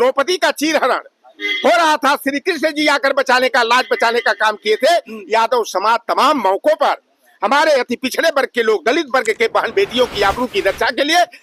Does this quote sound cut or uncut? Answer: uncut